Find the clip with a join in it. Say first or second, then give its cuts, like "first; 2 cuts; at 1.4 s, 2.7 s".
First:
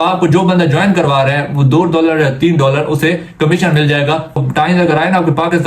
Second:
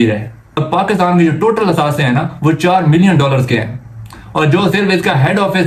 first; 1 cut; at 4.4 s